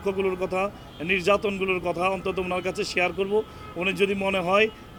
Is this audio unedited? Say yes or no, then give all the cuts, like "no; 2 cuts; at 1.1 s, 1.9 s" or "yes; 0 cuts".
yes; 0 cuts